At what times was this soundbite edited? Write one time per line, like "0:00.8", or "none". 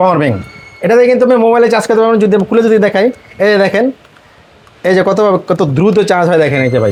none